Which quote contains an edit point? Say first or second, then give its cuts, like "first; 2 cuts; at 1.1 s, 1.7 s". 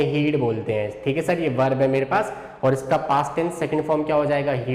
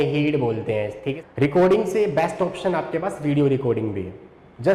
second; 1 cut; at 1.1 s